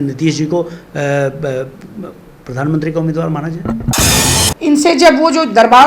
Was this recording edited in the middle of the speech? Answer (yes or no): yes